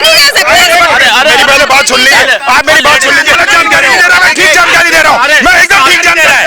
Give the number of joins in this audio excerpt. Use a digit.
1